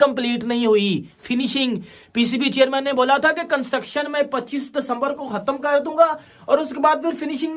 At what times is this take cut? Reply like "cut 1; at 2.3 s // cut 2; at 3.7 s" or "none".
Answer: none